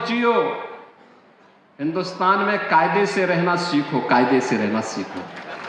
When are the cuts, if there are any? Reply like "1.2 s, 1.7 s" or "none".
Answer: none